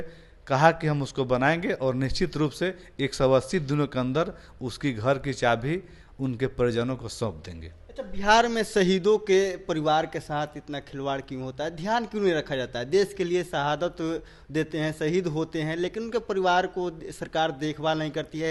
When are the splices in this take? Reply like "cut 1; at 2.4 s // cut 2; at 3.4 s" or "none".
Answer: none